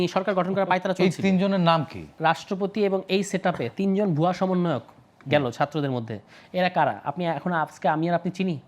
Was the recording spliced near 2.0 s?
yes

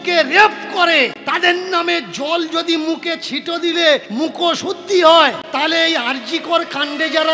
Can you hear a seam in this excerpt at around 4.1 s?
yes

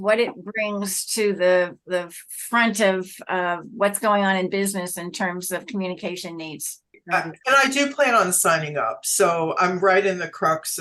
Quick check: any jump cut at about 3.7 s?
no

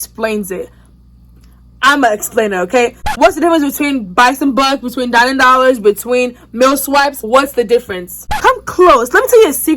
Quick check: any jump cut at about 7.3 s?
yes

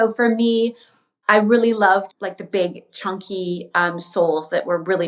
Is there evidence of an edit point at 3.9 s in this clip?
no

